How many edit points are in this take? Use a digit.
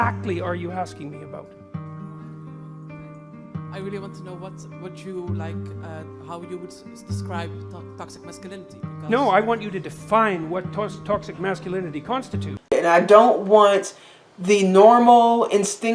1